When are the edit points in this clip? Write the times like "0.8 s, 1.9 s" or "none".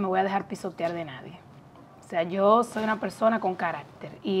none